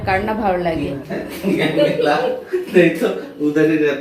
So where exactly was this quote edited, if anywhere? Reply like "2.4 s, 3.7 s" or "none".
1.0 s